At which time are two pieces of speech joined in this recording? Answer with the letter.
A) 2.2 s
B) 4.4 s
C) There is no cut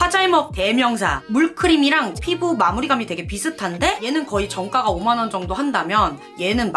A